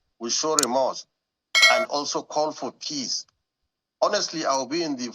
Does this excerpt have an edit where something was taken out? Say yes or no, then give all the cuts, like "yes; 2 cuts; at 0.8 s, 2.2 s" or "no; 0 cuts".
no; 0 cuts